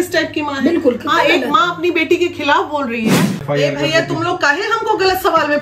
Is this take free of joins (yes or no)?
no